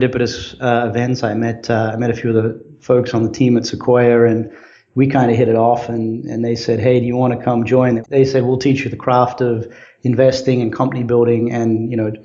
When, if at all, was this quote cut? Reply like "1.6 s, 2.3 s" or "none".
8.0 s